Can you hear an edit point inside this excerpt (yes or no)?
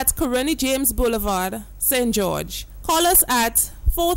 yes